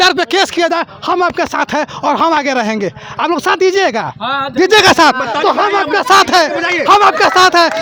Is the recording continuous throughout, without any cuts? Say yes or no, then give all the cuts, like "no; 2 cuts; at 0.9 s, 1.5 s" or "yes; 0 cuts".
yes; 0 cuts